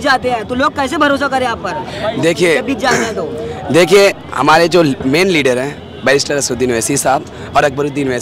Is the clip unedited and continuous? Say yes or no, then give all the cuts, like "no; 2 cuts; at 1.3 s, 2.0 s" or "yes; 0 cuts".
yes; 0 cuts